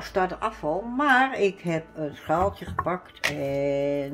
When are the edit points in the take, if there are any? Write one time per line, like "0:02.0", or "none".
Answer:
none